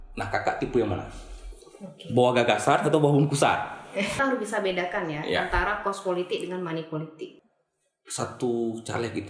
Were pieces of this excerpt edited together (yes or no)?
yes